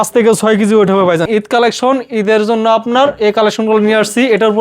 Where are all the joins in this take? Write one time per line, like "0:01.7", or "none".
0:01.3